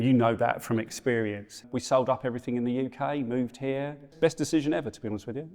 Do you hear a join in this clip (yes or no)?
yes